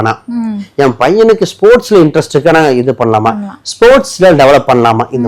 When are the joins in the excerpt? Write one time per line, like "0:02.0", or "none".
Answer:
none